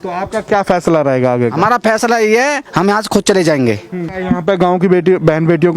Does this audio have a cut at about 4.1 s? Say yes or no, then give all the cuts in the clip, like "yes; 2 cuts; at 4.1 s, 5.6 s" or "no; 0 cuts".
yes; 1 cut; at 4.1 s